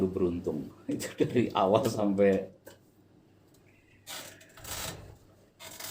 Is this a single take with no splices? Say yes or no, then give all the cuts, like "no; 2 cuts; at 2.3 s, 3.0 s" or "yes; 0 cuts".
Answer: yes; 0 cuts